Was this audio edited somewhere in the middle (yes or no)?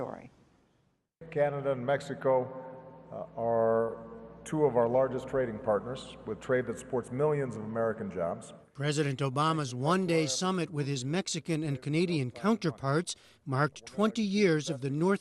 yes